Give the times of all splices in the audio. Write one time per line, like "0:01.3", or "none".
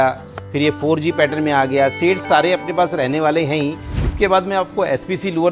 0:04.0